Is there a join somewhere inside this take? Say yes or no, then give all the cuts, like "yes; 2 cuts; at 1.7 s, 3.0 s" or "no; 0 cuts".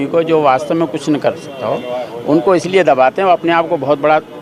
no; 0 cuts